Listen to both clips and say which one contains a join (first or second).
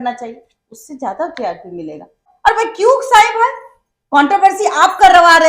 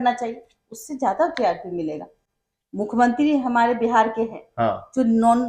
first